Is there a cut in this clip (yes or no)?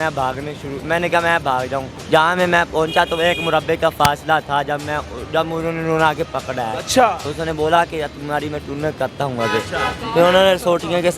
yes